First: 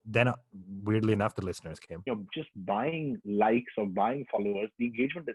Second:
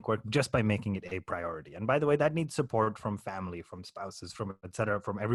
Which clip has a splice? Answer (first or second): first